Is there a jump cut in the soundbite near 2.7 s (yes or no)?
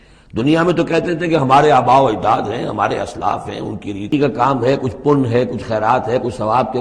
no